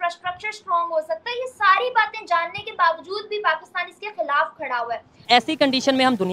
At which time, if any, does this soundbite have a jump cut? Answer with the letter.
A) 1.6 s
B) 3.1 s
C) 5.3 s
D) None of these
C